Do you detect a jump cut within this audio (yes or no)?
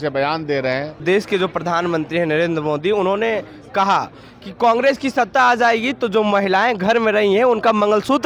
yes